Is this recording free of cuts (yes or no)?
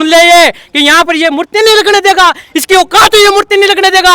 yes